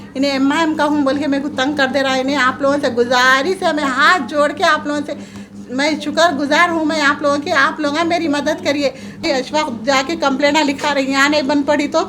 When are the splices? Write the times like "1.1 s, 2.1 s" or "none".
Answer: 9.2 s